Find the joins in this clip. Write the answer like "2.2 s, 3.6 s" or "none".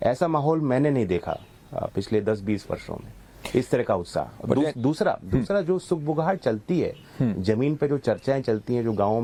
none